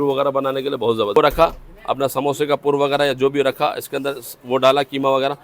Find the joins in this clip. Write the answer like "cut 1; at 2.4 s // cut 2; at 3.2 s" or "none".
cut 1; at 1.2 s